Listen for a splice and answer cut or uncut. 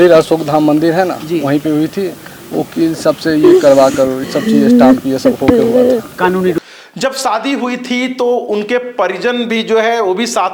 uncut